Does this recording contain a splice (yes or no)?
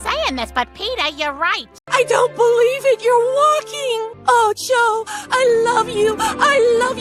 yes